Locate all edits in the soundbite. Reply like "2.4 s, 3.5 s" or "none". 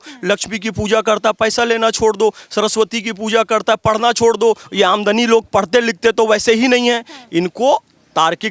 none